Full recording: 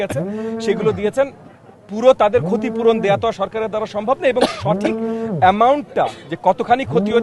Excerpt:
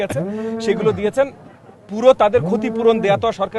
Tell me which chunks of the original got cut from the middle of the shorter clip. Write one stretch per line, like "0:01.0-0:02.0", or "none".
none